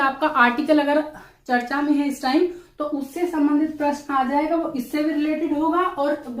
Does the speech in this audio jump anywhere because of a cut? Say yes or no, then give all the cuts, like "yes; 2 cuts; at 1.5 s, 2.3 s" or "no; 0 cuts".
no; 0 cuts